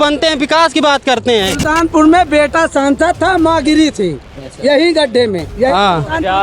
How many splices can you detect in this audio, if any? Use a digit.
1